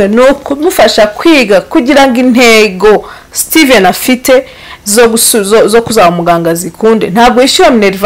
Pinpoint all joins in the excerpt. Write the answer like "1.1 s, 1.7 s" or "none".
none

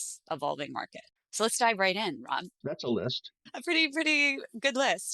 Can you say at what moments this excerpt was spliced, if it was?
2.5 s, 3.3 s

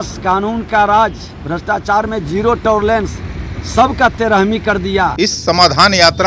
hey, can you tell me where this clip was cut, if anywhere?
5.1 s

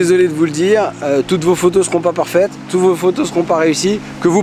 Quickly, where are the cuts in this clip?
none

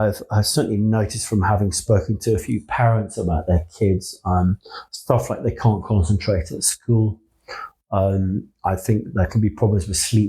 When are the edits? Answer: none

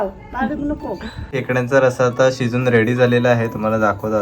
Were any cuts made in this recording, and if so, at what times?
1.4 s

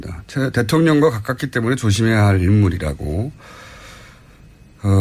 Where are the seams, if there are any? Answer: 2.3 s

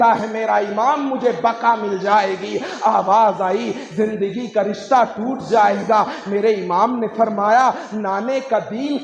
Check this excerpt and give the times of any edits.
none

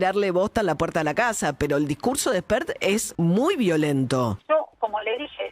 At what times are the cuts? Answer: 3.0 s, 4.4 s

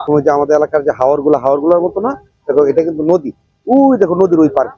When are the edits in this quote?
none

